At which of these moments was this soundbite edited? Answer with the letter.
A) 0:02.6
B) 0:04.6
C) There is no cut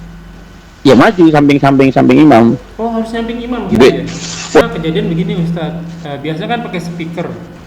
B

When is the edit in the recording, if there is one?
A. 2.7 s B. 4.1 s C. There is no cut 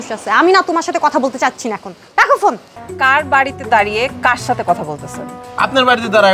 A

